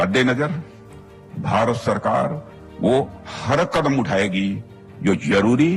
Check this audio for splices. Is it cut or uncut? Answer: uncut